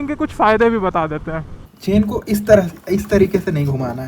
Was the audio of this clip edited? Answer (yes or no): yes